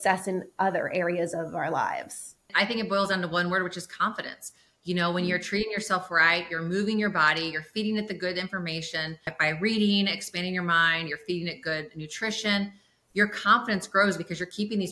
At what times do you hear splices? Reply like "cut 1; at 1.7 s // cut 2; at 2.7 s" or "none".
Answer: none